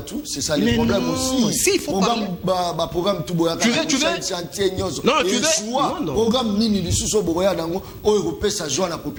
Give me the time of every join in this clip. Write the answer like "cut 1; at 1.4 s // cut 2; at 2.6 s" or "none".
none